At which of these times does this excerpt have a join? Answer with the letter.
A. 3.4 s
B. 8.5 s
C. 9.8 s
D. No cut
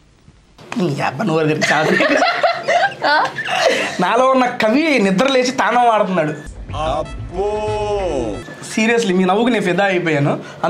D